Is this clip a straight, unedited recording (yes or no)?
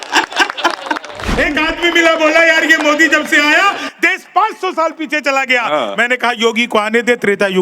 no